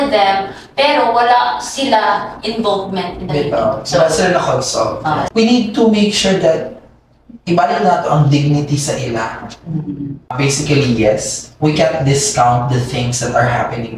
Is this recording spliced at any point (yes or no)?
yes